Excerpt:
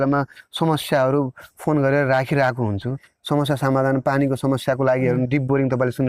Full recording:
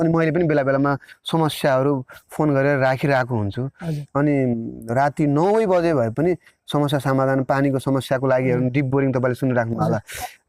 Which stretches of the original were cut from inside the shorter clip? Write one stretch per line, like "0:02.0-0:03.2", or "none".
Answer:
0:03.8-0:06.5